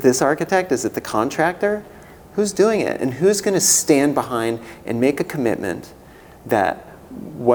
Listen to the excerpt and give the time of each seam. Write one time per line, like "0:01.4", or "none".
none